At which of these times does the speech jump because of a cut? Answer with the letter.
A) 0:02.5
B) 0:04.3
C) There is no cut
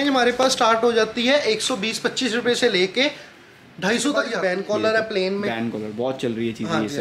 B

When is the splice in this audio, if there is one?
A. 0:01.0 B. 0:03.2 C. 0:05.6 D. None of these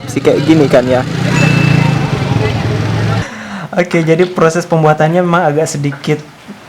B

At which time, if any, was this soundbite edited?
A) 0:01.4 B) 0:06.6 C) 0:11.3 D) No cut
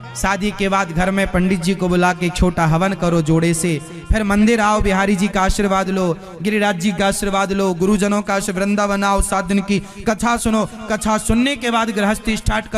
D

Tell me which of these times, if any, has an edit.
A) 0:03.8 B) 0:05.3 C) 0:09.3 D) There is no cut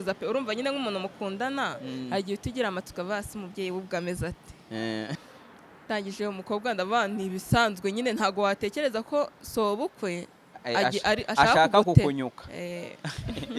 B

